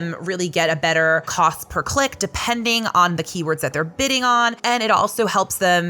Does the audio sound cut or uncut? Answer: cut